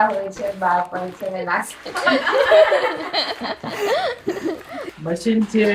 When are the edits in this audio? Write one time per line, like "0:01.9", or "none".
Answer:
0:04.8